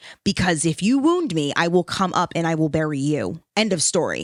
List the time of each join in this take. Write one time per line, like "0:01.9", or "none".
none